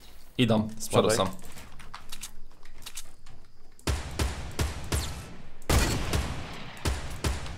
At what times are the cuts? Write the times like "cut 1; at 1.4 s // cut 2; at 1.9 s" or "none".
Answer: none